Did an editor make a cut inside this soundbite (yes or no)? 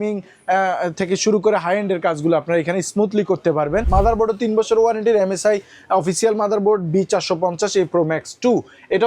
yes